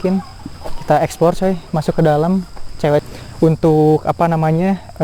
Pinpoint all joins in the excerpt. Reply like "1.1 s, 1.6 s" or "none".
3.0 s